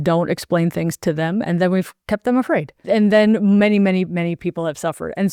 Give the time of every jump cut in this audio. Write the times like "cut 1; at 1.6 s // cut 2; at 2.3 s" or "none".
cut 1; at 2.0 s // cut 2; at 2.7 s

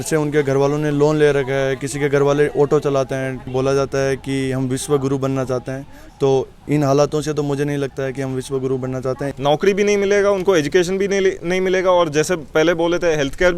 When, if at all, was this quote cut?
cut 1; at 3.5 s // cut 2; at 9.3 s

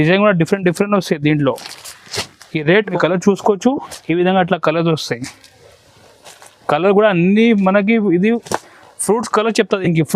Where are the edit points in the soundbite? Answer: cut 1; at 3.0 s

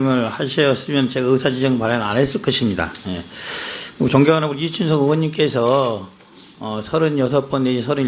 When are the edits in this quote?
none

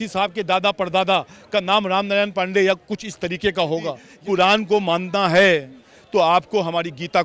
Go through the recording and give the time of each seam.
cut 1; at 4.1 s

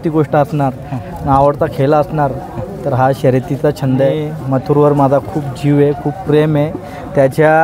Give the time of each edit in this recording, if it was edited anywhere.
cut 1; at 4.3 s

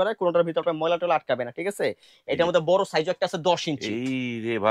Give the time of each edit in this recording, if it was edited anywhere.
none

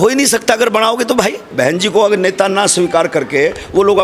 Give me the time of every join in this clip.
cut 1; at 1.5 s

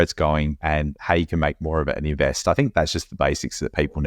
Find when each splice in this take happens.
cut 1; at 0.9 s

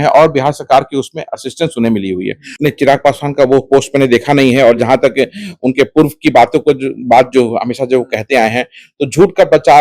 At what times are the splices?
cut 1; at 2.4 s

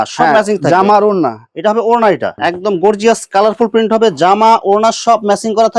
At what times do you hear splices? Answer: cut 1; at 2.4 s

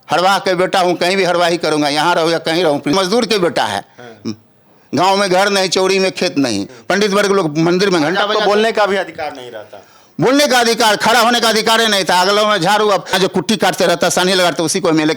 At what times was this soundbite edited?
cut 1; at 2.9 s // cut 2; at 6.7 s // cut 3; at 13.2 s

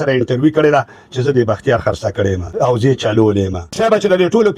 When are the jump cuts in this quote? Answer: cut 1; at 2.4 s // cut 2; at 3.6 s

